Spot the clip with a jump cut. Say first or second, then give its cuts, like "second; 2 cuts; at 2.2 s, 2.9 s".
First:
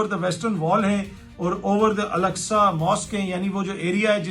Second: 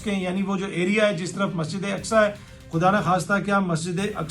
second; 1 cut; at 2.5 s